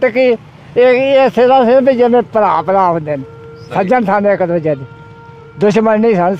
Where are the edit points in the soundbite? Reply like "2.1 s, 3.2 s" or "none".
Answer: none